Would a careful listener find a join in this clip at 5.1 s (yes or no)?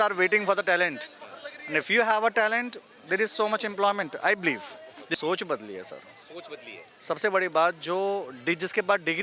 yes